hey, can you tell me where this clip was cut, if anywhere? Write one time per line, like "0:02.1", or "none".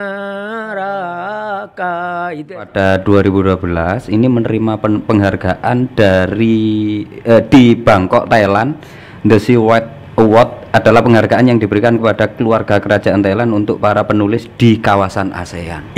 0:02.7